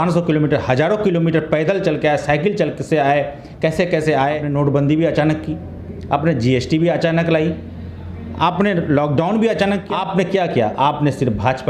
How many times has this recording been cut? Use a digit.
2